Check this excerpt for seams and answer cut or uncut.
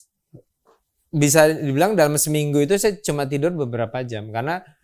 uncut